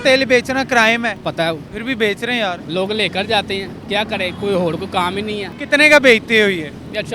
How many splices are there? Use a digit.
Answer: 3